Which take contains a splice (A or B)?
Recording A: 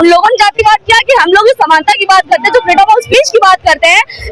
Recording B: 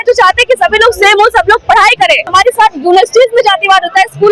B